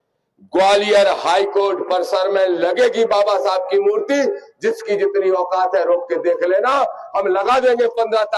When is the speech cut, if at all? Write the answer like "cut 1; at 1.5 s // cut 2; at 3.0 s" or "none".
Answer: none